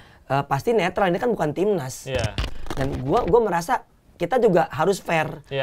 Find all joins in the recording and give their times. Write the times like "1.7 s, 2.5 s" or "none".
2.4 s